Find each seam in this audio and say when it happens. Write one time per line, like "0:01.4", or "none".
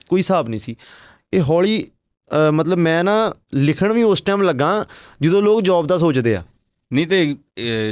none